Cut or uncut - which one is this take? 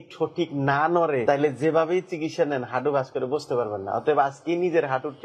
cut